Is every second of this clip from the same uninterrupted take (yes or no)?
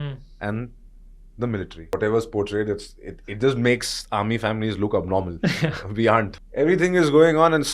no